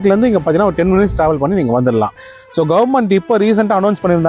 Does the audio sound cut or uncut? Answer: cut